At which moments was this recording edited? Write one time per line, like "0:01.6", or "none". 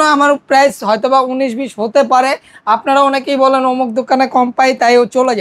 none

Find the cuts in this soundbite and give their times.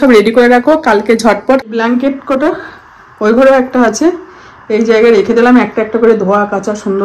0:01.6

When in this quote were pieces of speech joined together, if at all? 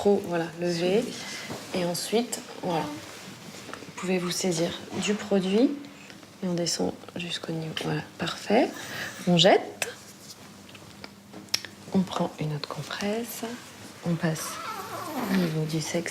0:02.6

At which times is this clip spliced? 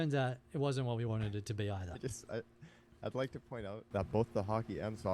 0:03.8

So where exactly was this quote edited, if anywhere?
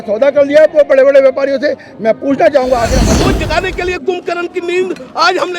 0:03.1

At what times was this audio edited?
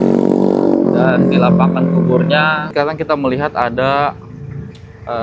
0:02.7

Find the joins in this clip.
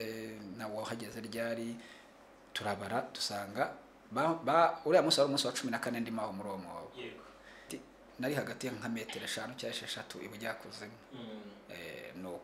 0:07.7

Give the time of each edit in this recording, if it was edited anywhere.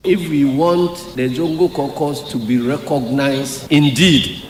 none

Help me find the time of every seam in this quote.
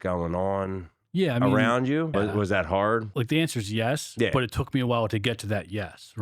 0:02.1
0:03.1

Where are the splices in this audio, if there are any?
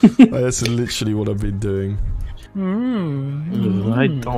0:02.3

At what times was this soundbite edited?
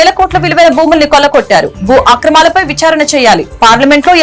none

